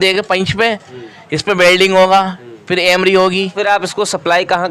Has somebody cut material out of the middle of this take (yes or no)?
yes